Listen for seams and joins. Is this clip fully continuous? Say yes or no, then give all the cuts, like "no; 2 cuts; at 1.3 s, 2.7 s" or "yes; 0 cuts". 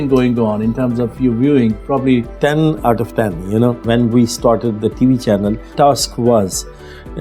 no; 3 cuts; at 2.3 s, 3.8 s, 5.7 s